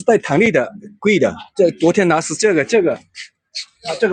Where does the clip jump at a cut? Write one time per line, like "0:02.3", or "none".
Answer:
none